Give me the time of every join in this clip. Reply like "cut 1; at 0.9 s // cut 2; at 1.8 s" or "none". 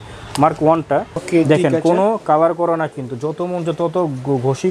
cut 1; at 1.2 s